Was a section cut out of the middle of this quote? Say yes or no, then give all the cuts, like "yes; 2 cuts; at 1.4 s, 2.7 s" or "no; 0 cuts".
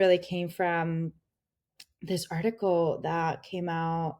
no; 0 cuts